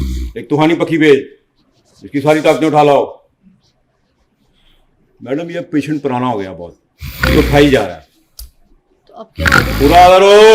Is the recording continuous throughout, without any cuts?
yes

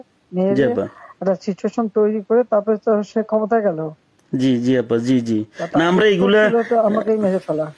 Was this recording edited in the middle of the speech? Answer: no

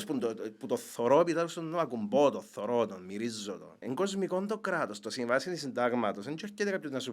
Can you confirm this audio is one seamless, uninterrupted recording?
no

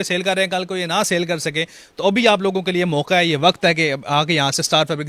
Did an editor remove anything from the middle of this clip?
no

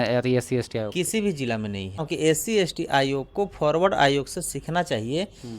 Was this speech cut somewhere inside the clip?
yes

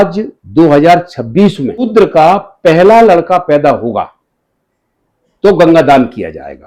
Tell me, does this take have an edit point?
yes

